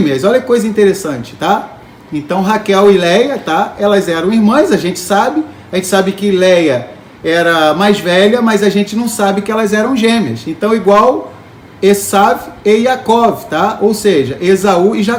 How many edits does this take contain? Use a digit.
0